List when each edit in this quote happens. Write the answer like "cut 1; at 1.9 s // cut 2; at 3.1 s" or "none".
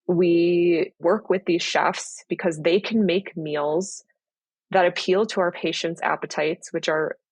cut 1; at 1.0 s